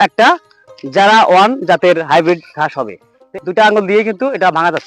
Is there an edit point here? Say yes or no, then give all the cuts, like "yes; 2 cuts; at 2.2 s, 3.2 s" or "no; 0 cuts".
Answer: yes; 1 cut; at 3.3 s